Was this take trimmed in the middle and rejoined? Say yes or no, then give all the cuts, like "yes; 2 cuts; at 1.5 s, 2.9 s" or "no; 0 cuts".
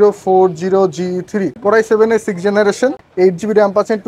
yes; 2 cuts; at 1.5 s, 3.0 s